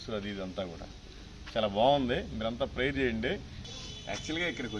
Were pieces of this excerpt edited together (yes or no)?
yes